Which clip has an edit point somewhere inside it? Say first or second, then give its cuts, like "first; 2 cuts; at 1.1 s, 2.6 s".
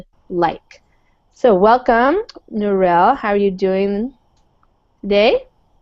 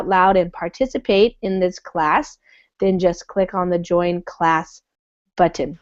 first; 1 cut; at 3.5 s